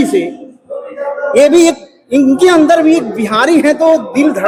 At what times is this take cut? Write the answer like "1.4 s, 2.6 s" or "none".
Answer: none